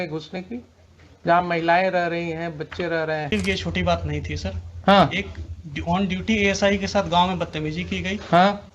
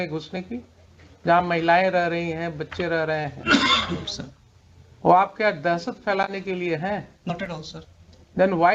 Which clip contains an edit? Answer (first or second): first